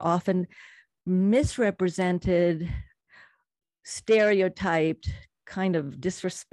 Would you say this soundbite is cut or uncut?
cut